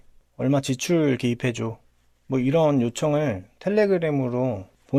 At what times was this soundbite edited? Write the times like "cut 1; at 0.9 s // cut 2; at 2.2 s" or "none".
none